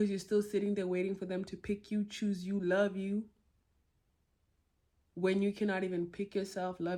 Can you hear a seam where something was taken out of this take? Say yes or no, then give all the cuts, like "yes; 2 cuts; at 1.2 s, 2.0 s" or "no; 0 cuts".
no; 0 cuts